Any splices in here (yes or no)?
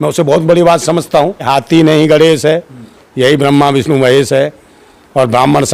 yes